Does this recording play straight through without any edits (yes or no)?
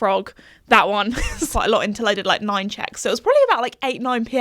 no